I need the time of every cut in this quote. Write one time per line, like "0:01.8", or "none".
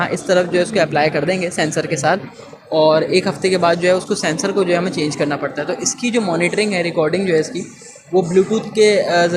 none